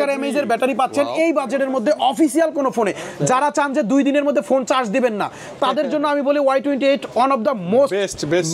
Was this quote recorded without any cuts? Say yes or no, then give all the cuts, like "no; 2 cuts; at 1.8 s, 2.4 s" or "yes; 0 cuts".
yes; 0 cuts